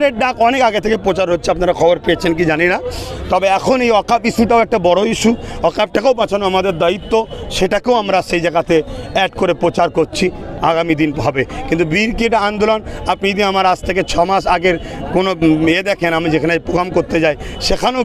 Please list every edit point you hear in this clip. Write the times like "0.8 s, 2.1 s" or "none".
none